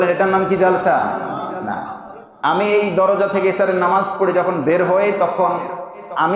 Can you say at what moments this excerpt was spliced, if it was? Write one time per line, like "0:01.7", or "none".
none